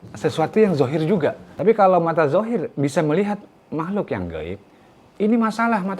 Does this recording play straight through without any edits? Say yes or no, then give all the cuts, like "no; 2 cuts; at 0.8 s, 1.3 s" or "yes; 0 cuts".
no; 1 cut; at 1.5 s